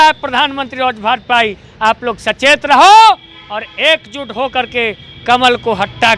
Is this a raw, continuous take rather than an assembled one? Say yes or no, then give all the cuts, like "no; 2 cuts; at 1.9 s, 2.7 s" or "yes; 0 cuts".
yes; 0 cuts